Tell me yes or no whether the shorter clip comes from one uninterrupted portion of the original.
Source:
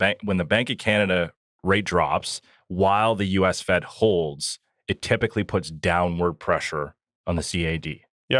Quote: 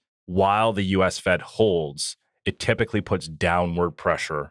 yes